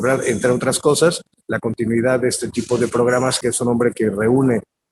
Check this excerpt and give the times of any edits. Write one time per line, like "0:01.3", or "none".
0:03.4